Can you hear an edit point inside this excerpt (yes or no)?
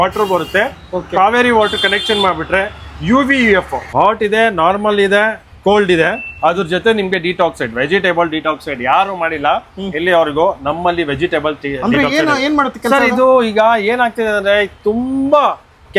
yes